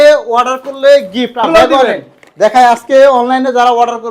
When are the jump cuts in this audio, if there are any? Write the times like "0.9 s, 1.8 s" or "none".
1.5 s

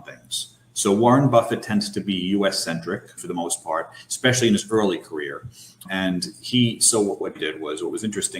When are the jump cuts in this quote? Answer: 3.2 s, 5.9 s, 7.3 s

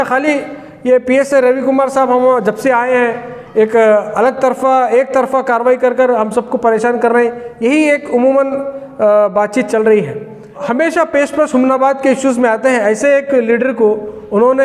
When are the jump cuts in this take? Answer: 10.6 s

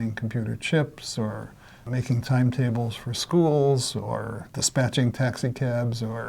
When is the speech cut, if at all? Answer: 1.8 s

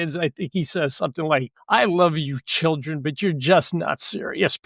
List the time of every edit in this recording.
1.5 s

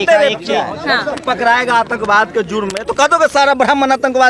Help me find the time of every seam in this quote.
1.2 s

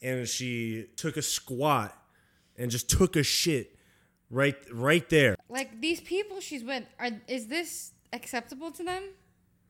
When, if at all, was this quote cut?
0.9 s, 5.5 s

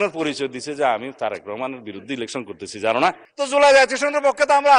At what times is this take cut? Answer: 3.2 s

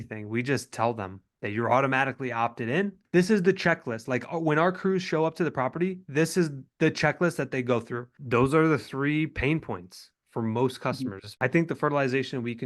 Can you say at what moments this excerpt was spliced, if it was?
3.0 s, 8.1 s, 11.2 s

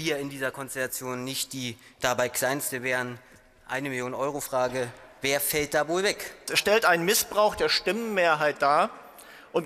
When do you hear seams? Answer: 6.5 s

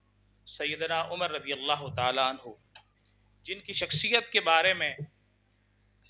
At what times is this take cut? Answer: none

